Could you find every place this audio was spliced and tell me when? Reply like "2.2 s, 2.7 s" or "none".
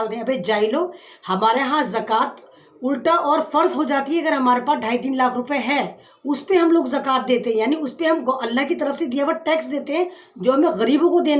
none